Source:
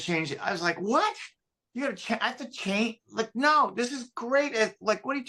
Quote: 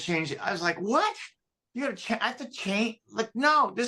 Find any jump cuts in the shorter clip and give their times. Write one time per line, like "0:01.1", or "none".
none